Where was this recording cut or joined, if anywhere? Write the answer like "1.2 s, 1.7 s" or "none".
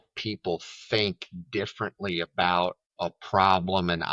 2.9 s